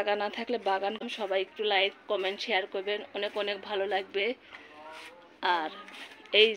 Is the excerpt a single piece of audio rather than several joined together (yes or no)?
no